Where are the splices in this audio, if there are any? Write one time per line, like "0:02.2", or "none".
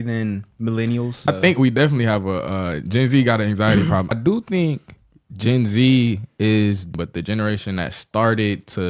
0:01.3
0:04.1
0:06.9